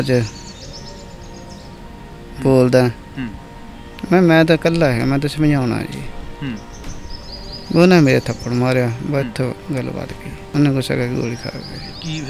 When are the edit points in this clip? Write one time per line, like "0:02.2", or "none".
0:10.4